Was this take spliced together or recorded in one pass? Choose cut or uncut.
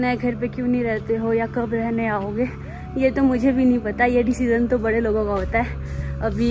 uncut